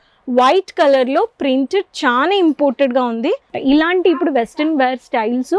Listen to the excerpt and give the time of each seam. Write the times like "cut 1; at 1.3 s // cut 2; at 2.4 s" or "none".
cut 1; at 3.5 s

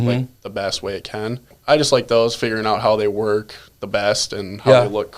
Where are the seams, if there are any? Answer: cut 1; at 1.5 s

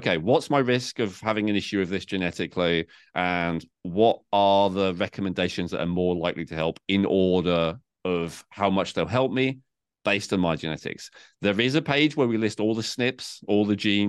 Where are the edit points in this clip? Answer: none

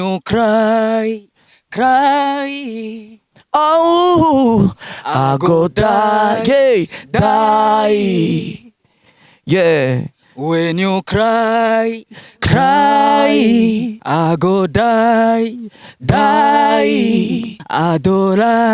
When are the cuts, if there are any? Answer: cut 1; at 14.0 s // cut 2; at 17.6 s

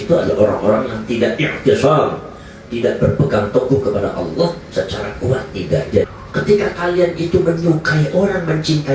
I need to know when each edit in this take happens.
cut 1; at 6.1 s

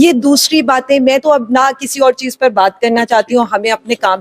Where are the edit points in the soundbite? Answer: none

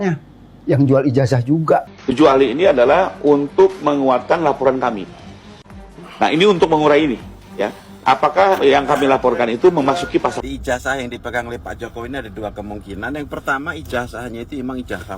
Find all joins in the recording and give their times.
cut 1; at 2.0 s

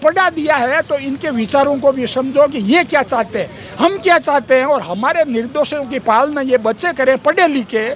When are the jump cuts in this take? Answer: none

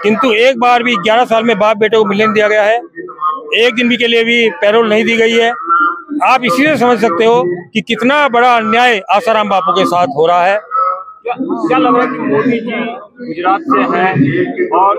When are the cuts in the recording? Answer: none

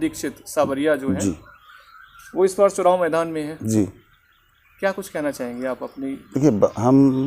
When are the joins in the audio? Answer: none

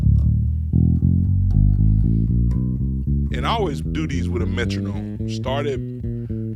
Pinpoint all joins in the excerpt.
none

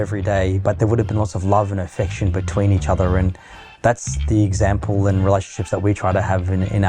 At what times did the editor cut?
none

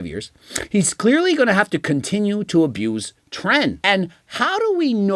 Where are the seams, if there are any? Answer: cut 1; at 3.8 s

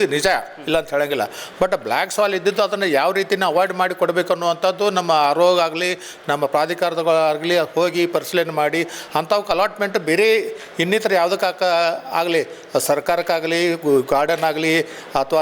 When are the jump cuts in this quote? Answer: none

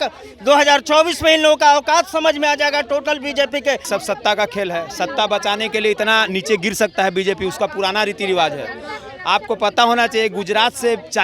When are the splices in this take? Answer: cut 1; at 3.8 s

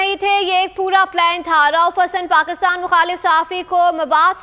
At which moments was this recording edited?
none

